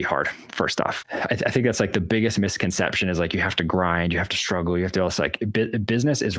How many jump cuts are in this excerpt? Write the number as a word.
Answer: one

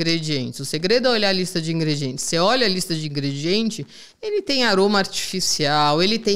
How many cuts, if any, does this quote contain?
zero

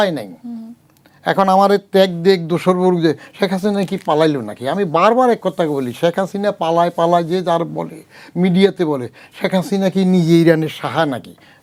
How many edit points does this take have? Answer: zero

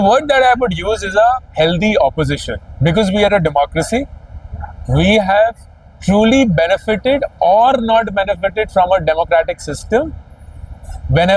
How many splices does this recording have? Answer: zero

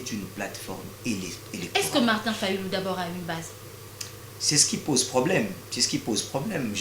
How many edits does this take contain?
zero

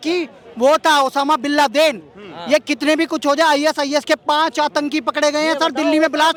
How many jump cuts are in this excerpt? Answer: zero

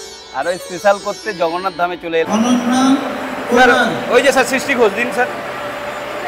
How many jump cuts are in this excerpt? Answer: one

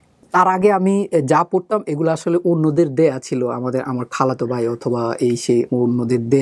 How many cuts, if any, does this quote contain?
zero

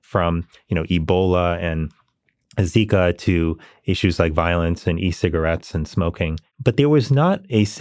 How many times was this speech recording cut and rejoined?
one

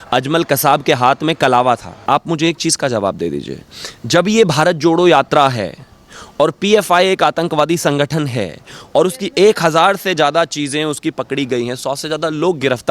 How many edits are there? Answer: one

